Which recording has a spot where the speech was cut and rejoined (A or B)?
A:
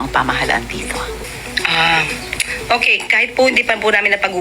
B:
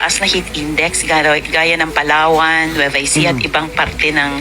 A